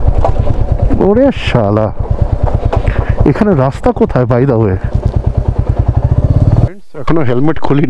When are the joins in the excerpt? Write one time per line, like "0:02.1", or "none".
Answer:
0:06.7